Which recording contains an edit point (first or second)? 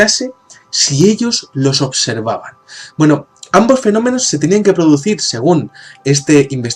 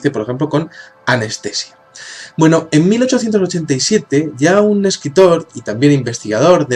second